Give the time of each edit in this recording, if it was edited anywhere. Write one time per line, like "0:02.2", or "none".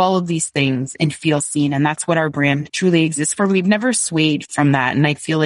0:00.9
0:02.7
0:04.4